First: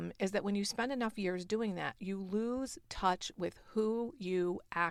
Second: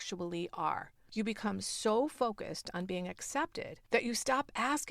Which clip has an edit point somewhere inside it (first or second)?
second